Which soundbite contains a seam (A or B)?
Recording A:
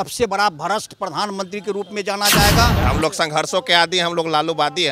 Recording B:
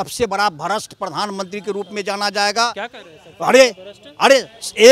A